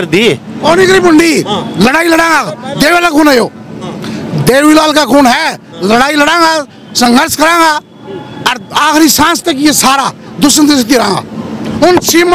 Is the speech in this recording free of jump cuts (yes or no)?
yes